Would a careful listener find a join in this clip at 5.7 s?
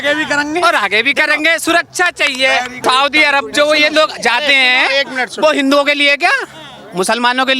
no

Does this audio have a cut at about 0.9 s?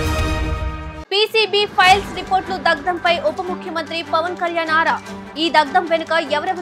yes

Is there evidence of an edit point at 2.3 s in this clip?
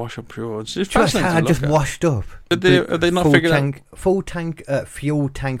yes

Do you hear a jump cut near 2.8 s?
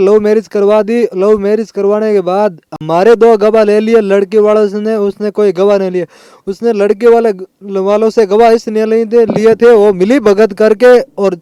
no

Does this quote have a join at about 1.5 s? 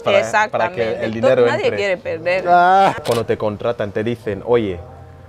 no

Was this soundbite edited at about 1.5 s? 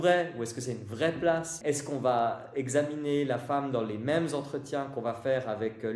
yes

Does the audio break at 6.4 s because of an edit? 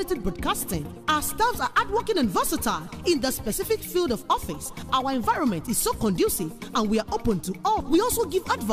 no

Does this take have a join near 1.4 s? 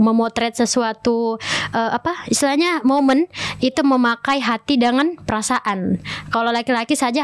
no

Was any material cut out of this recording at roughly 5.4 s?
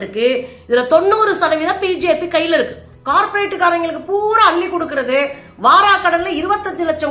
no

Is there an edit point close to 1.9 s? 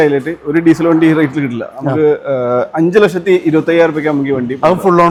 no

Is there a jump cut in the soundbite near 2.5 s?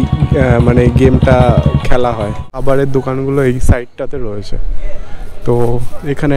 yes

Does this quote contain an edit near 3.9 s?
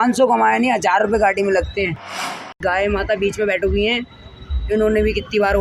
no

